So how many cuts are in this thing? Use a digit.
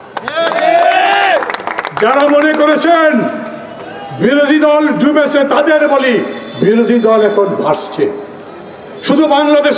0